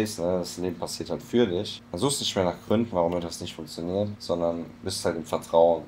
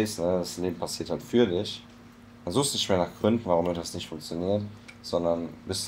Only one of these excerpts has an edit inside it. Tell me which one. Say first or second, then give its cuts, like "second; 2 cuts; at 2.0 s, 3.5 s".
first; 2 cuts; at 1.8 s, 4.2 s